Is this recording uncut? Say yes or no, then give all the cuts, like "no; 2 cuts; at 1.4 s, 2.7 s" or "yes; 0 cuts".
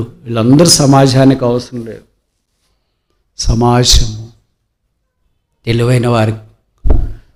yes; 0 cuts